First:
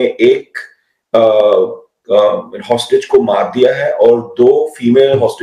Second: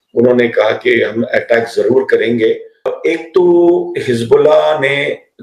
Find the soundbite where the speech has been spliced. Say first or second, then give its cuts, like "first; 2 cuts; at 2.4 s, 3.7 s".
second; 1 cut; at 2.9 s